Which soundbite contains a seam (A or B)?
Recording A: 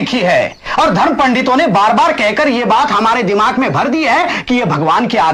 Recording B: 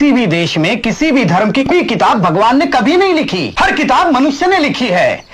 B